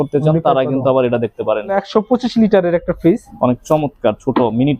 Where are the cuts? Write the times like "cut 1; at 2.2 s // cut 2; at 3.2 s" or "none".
cut 1; at 1.8 s // cut 2; at 3.3 s